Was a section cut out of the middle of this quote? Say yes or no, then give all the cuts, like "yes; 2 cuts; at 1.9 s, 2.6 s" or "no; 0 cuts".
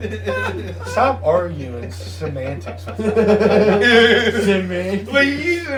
no; 0 cuts